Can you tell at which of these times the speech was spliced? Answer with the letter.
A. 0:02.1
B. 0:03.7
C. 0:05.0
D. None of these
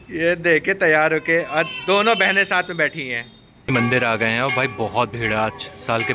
B